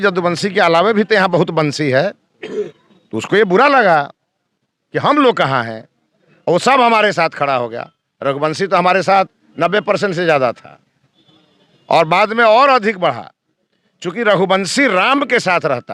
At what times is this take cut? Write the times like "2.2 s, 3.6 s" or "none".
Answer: none